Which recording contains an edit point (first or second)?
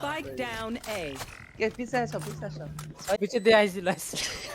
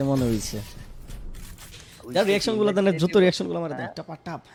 first